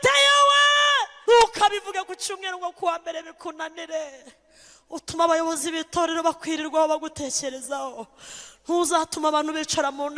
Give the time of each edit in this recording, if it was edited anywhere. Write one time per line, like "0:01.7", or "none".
0:01.1